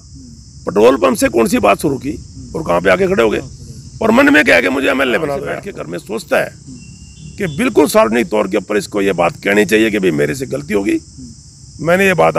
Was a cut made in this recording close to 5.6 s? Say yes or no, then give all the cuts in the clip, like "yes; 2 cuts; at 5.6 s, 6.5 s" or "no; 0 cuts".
yes; 1 cut; at 5.6 s